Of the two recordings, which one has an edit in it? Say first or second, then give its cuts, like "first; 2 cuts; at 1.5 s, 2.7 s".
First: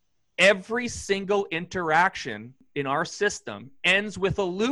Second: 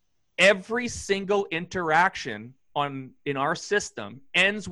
first; 1 cut; at 2.6 s